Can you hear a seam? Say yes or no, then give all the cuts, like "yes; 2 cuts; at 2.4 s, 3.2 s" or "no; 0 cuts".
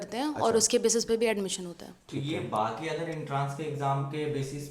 no; 0 cuts